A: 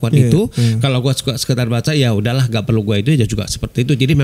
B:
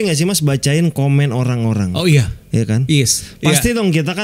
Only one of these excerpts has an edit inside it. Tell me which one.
B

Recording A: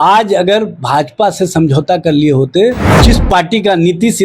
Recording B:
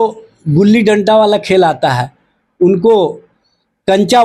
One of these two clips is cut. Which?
A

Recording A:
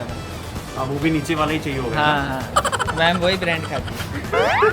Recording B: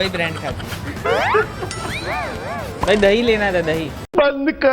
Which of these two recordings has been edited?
B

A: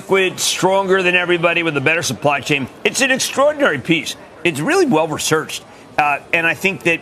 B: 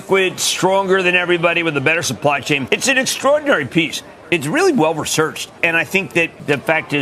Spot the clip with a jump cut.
B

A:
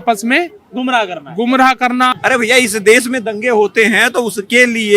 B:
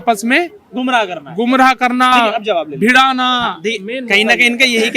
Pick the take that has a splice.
A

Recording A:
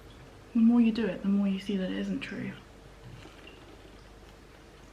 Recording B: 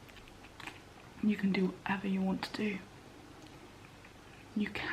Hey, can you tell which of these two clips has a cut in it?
B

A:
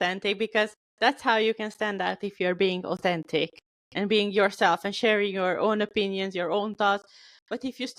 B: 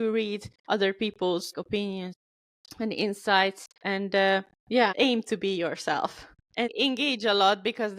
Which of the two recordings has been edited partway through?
B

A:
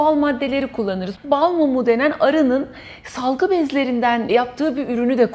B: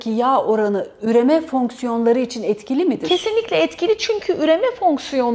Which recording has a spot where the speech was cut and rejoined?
A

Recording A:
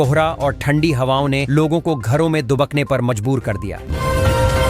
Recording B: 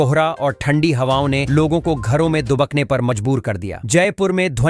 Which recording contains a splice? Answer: A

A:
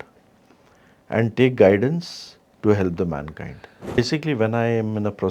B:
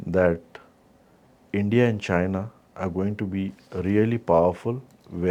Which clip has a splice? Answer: A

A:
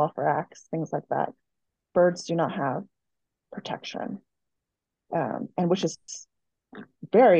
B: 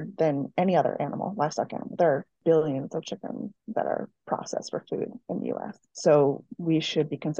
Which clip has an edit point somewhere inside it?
B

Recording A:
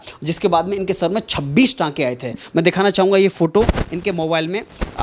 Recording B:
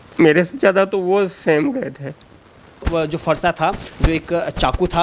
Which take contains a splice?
B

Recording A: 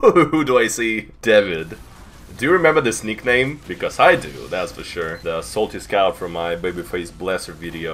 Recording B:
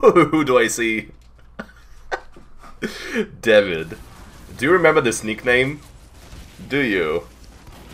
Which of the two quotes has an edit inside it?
A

